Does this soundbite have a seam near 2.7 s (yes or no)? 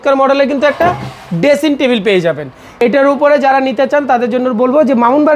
yes